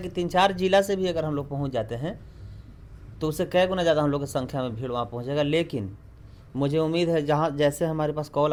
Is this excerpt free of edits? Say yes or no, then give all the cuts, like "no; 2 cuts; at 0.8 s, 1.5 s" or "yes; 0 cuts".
yes; 0 cuts